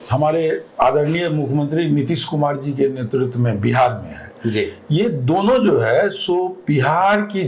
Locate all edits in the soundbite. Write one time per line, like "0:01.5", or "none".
none